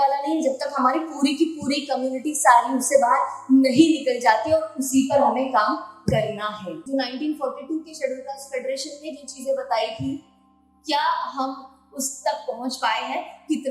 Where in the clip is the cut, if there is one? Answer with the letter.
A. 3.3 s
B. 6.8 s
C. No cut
B